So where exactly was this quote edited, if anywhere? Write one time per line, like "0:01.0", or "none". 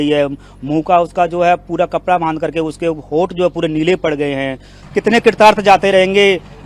0:04.8